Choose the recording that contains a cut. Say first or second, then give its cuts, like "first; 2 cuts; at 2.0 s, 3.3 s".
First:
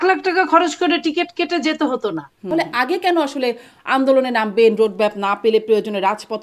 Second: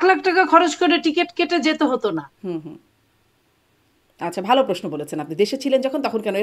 first; 1 cut; at 2.5 s